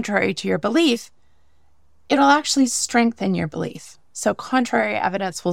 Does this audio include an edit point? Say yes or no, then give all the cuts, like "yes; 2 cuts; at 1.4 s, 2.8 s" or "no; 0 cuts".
no; 0 cuts